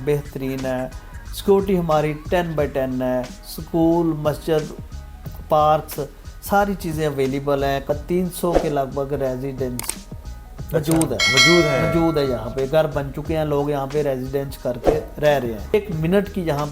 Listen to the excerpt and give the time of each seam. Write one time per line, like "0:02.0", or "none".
0:07.9
0:15.7

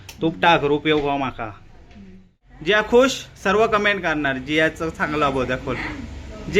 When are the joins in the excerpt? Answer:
0:02.5

